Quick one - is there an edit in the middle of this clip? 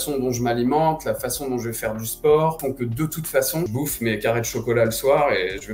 yes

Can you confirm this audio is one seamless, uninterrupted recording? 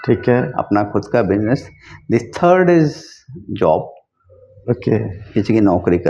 yes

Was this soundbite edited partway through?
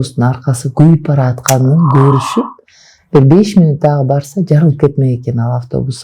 no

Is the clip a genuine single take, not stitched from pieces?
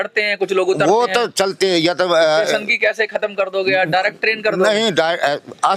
yes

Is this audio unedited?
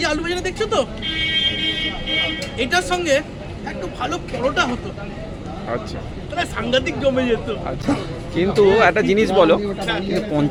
yes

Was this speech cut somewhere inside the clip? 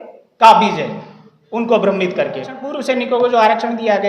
yes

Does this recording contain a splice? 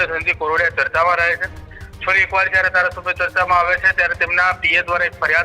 no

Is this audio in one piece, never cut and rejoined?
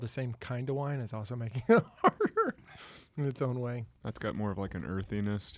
no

